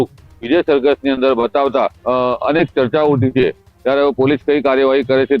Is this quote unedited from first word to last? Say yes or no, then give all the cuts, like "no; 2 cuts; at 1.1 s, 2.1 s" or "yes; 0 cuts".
no; 1 cut; at 2.0 s